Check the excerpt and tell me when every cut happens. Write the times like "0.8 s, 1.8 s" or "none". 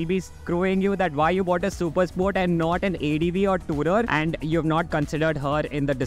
4.1 s